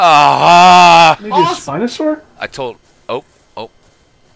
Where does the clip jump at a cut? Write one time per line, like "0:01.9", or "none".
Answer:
0:01.6